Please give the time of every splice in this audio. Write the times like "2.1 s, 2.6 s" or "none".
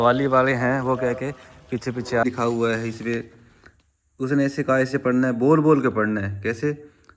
2.2 s